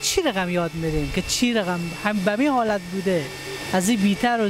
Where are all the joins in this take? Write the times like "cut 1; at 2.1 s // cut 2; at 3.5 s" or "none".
none